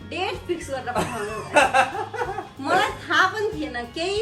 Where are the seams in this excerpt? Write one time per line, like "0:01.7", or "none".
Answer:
none